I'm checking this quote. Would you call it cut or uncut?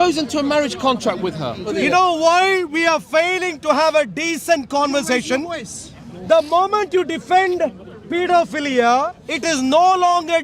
cut